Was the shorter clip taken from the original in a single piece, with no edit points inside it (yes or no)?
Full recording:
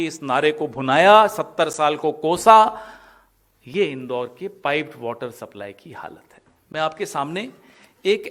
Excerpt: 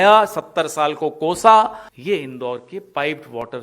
no